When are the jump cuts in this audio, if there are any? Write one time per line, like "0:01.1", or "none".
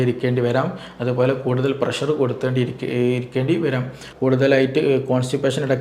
0:04.1